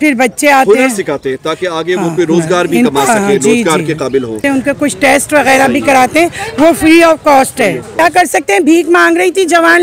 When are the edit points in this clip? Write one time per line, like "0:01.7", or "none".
0:04.4
0:08.0

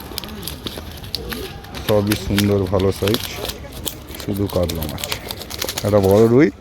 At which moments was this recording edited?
0:05.6

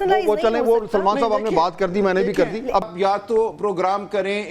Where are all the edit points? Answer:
0:02.9

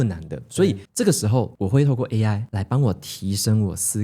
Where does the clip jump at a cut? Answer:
0:00.8
0:02.5

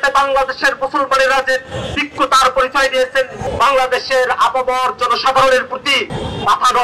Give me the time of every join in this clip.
none

